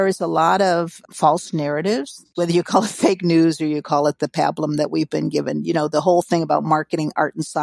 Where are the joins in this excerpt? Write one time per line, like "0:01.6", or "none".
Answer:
0:01.0
0:02.2